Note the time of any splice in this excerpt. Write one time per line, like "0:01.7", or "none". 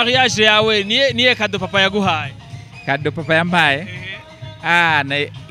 none